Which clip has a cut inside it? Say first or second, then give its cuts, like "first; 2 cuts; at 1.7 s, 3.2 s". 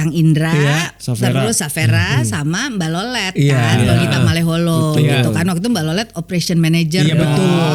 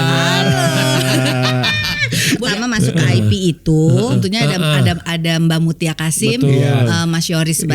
second; 2 cuts; at 2.5 s, 4.2 s